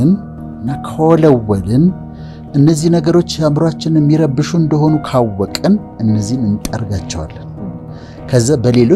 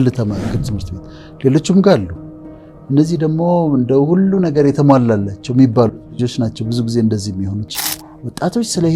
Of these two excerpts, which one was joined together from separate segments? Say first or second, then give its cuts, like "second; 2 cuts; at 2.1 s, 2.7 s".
second; 1 cut; at 7.7 s